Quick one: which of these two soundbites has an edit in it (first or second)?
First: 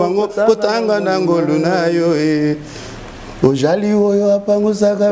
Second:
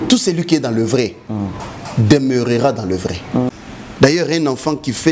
second